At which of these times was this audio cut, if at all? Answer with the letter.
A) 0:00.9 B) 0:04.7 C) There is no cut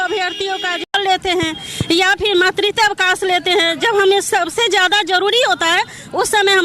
A